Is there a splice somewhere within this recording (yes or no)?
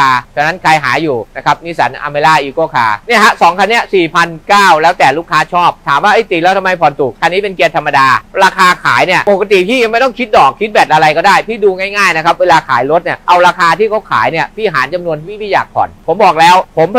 yes